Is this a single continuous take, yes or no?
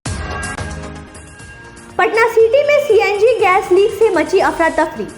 no